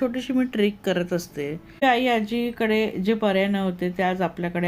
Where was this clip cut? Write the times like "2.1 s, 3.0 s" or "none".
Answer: 1.8 s